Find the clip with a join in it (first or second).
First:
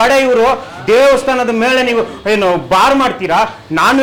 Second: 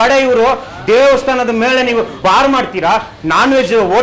second